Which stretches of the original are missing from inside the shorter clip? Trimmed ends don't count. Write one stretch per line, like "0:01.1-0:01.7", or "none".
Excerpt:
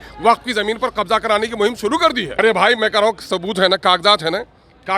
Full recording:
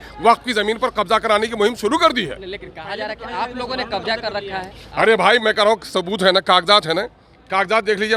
0:02.4-0:05.0